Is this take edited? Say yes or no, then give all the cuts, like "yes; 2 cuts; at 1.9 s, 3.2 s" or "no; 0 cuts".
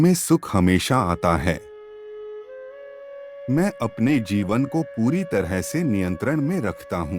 yes; 2 cuts; at 1.6 s, 3.0 s